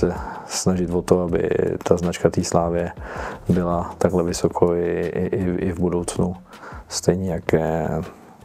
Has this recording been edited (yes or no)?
no